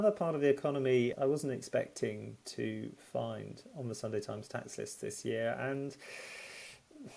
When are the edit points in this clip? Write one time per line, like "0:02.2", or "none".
0:01.1